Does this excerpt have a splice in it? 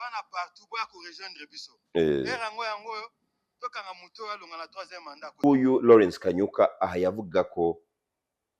yes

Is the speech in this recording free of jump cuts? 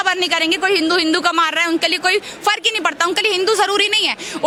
yes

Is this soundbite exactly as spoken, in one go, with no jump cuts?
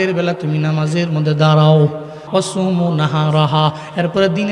no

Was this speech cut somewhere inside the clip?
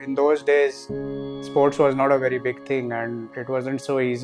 no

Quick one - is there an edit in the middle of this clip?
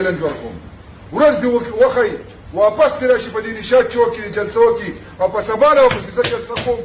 no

